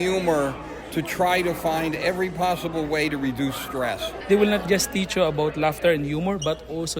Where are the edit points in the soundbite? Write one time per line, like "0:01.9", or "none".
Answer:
0:04.1